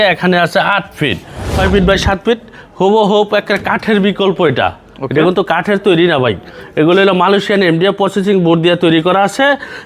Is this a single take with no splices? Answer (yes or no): no